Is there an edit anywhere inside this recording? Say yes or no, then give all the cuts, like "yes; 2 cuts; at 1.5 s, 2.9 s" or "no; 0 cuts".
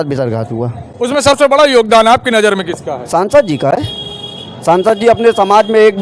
no; 0 cuts